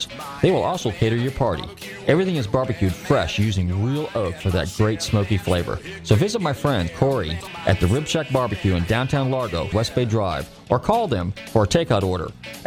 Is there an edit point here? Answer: yes; 2 cuts; at 7.1 s, 9.7 s

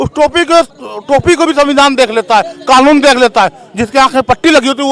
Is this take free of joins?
yes; 0 cuts

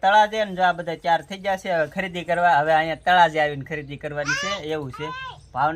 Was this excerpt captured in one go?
yes; 0 cuts

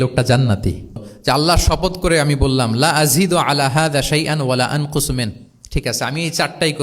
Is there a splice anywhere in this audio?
yes; 1 cut; at 1.1 s

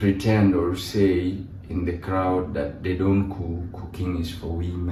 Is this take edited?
no; 0 cuts

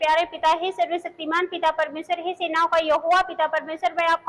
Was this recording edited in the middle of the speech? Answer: no; 0 cuts

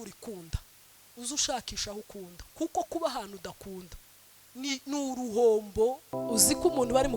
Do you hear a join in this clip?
yes; 1 cut; at 6.2 s

